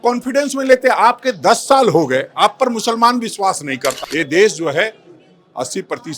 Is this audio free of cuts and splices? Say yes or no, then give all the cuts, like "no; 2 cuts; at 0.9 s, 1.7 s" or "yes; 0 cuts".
no; 1 cut; at 4.0 s